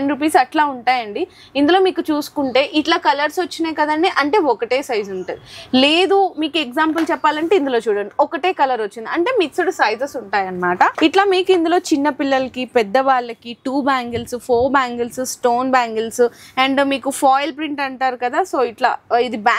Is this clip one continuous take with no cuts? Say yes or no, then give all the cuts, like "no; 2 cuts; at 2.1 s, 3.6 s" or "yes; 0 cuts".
yes; 0 cuts